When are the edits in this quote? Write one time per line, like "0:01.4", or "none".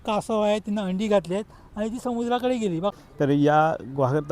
0:02.9